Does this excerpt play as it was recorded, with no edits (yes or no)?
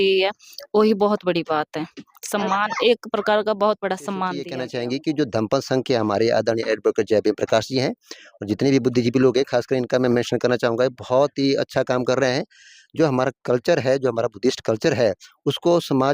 no